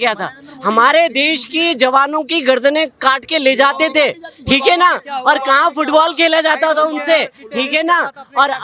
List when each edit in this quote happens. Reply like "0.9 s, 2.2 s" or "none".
none